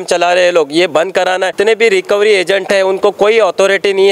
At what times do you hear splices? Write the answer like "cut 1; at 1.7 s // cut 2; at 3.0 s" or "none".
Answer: cut 1; at 1.5 s